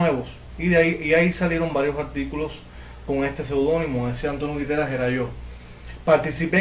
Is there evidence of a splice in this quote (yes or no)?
yes